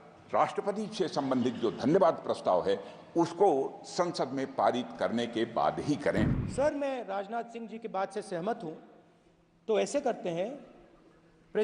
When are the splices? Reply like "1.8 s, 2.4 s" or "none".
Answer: 6.4 s